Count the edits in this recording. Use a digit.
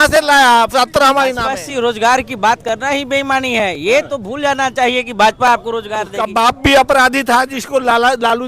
2